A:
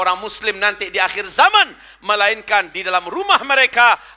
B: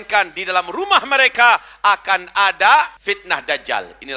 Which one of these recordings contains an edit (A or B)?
B